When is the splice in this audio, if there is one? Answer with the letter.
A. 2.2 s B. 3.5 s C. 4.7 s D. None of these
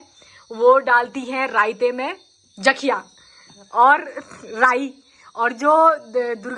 D